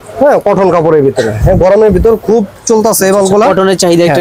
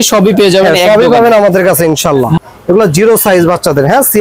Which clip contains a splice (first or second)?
second